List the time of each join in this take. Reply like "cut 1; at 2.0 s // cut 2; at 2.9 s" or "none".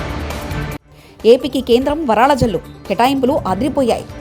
cut 1; at 0.9 s